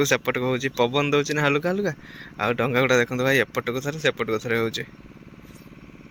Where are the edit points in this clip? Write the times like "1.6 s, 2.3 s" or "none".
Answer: none